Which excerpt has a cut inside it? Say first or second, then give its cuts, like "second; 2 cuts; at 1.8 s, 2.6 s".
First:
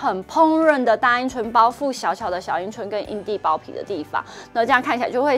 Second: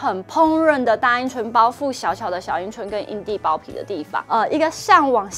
second; 1 cut; at 4.2 s